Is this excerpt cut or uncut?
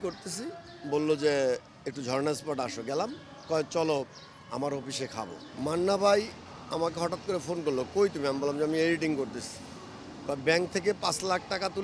cut